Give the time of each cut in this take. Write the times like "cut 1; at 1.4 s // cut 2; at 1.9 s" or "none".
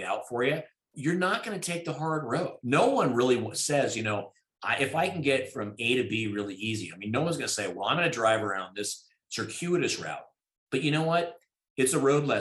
cut 1; at 0.9 s // cut 2; at 2.6 s